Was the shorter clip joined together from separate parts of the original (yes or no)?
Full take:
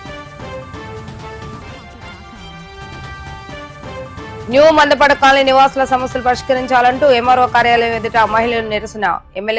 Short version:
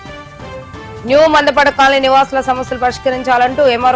yes